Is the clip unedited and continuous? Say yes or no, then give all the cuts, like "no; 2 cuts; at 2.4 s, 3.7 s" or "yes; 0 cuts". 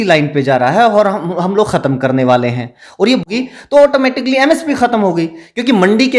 no; 1 cut; at 3.3 s